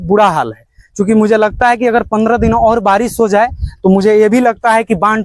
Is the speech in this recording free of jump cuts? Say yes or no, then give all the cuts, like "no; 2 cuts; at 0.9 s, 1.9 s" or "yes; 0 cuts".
yes; 0 cuts